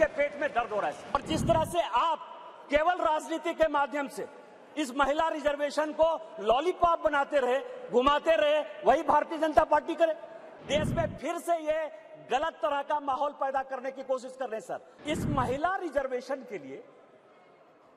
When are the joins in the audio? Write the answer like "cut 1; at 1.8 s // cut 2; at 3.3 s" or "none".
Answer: cut 1; at 1.1 s // cut 2; at 10.5 s // cut 3; at 14.9 s

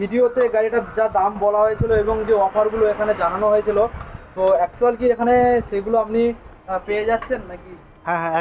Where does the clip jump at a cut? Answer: none

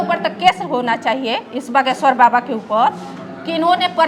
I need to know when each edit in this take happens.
none

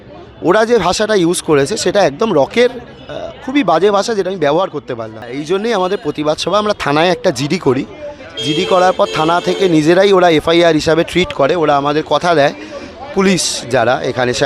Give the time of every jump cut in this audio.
cut 1; at 5.3 s

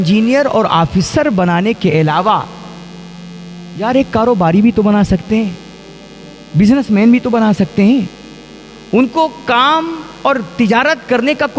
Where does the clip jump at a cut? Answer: none

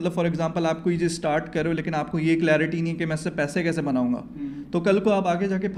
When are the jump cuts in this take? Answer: none

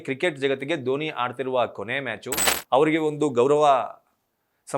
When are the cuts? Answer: cut 1; at 2.5 s

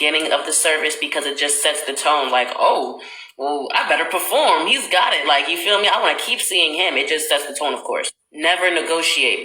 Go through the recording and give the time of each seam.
cut 1; at 7.8 s

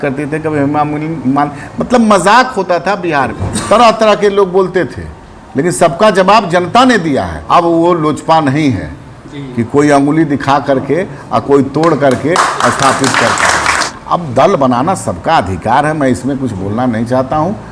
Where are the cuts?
cut 1; at 3.5 s // cut 2; at 7.3 s // cut 3; at 13.9 s

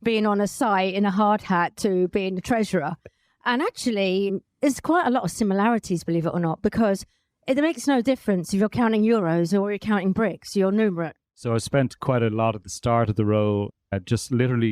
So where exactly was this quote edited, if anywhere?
cut 1; at 11.2 s

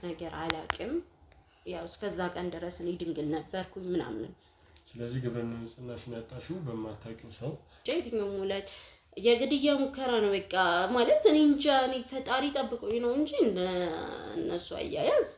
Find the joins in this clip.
cut 1; at 7.8 s

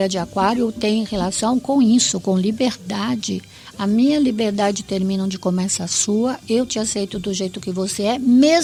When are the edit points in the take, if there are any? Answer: none

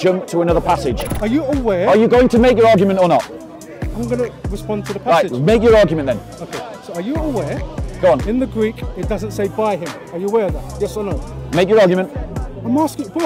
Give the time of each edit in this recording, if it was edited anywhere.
cut 1; at 1.1 s

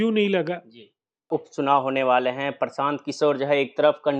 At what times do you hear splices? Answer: cut 1; at 1.3 s

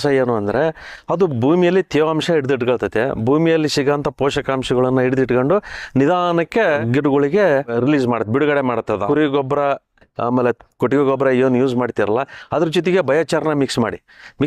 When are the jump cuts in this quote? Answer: cut 1; at 6.8 s // cut 2; at 7.7 s // cut 3; at 9.0 s

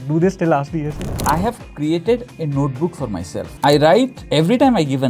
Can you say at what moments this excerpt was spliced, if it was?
cut 1; at 1.1 s // cut 2; at 3.4 s // cut 3; at 4.2 s

